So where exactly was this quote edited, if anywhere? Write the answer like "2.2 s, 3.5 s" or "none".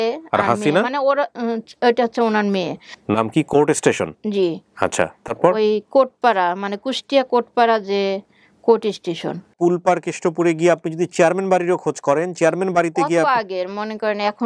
2.9 s, 9.5 s